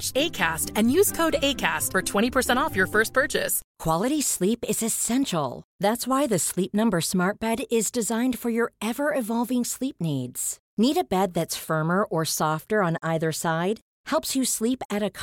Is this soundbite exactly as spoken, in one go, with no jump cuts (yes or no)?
no